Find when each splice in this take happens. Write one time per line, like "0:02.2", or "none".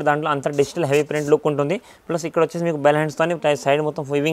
none

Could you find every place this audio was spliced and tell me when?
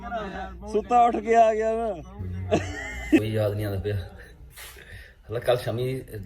0:03.2

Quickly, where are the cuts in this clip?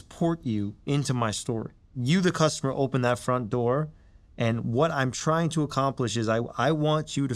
0:01.9

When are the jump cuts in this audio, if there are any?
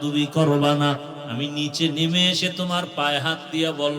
0:01.2

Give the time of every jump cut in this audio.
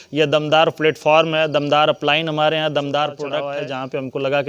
0:03.4

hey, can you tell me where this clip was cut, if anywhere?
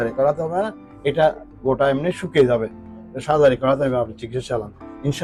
none

